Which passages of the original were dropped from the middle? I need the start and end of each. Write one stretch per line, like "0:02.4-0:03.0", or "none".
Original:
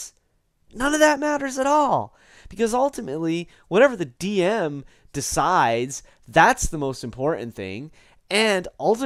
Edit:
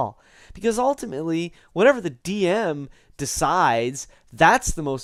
none